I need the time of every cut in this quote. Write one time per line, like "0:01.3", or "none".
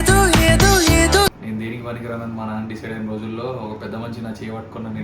0:01.4

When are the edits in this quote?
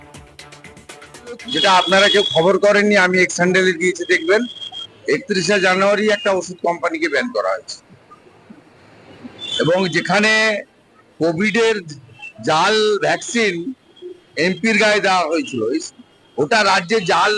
0:01.4

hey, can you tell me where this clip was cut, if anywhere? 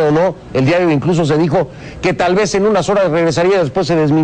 none

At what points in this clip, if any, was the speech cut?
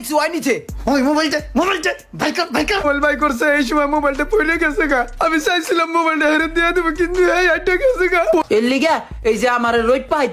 0:02.8
0:08.4

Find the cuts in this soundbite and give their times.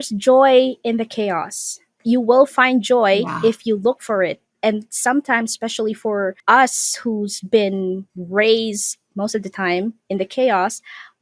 0:06.4
0:08.1

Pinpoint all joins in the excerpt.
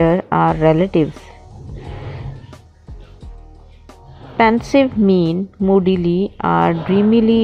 none

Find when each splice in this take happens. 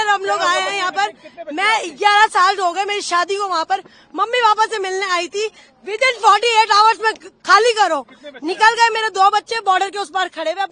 none

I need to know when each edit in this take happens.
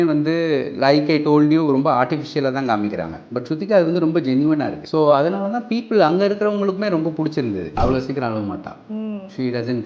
0:04.8
0:07.8

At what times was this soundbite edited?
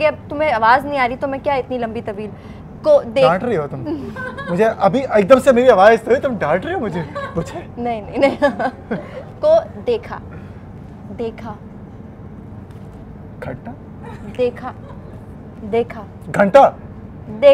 none

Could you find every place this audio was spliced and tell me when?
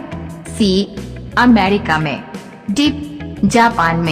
0:03.2

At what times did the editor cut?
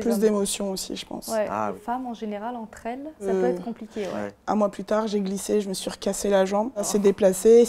0:01.8
0:03.2
0:04.3
0:06.9

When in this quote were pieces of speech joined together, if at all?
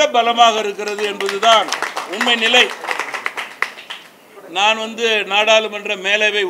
0:04.3

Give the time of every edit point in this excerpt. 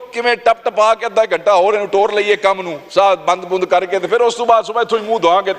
none

